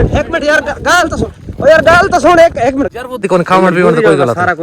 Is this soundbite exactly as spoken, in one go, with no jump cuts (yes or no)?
no